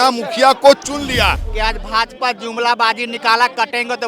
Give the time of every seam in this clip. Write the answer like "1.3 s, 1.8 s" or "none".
1.4 s